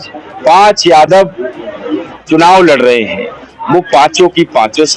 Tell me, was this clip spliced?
no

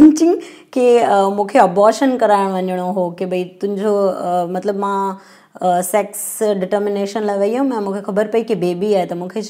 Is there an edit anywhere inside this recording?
no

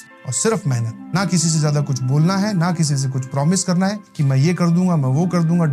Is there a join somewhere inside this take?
no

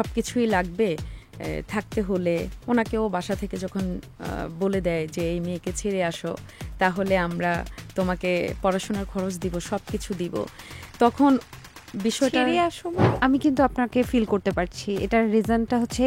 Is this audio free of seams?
no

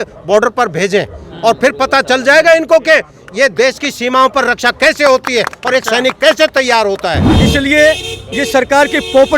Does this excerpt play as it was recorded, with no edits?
no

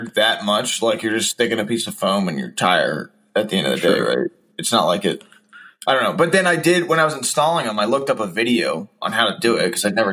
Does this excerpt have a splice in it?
no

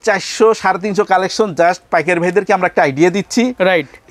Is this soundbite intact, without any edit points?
yes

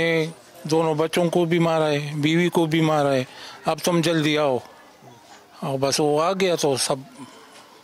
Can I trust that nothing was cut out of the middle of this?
yes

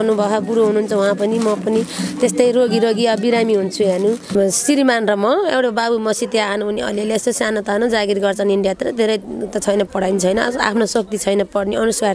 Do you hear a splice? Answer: yes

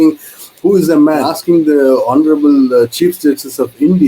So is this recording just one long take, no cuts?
no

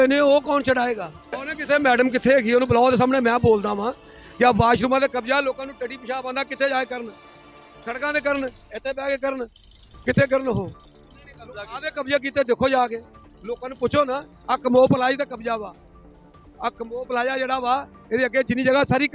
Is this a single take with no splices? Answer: no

